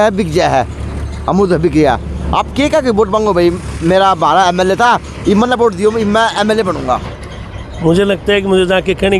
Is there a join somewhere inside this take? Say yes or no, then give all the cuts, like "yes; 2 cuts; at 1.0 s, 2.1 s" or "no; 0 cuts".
no; 0 cuts